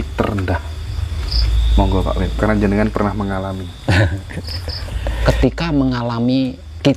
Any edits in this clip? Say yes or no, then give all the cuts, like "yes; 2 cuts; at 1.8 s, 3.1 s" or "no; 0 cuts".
yes; 1 cut; at 5.1 s